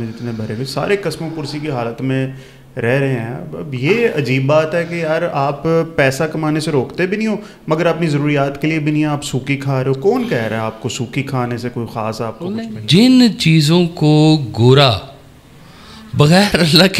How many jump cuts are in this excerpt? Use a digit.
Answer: 1